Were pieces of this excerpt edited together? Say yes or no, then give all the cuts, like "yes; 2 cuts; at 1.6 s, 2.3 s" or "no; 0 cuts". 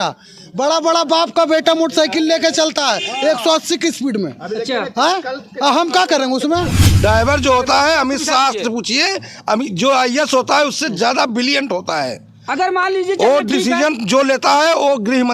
yes; 1 cut; at 6.8 s